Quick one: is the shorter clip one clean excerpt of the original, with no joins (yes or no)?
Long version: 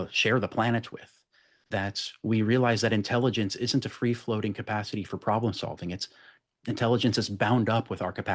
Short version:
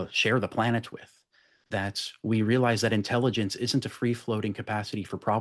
yes